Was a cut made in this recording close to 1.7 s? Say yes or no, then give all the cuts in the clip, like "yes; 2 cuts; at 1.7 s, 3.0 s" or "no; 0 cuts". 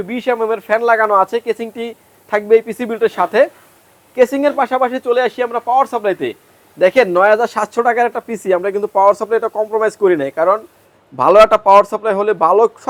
no; 0 cuts